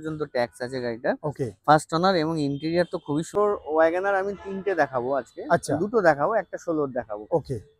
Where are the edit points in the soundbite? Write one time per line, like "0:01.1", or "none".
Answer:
0:03.4